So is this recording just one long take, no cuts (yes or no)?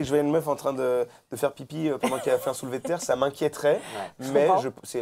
yes